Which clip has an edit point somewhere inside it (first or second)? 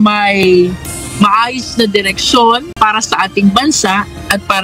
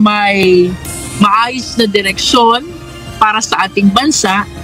first